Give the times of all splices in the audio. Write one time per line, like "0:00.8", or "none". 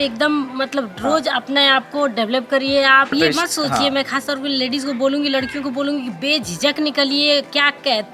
0:03.1